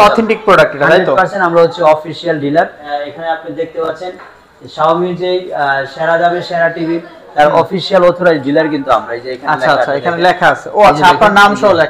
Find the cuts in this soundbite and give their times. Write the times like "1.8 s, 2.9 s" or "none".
2.8 s